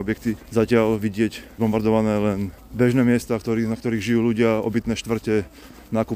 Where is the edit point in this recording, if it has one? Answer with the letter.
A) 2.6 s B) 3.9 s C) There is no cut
C